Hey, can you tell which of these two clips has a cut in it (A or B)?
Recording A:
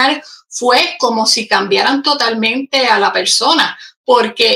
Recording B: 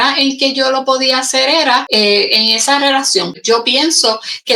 B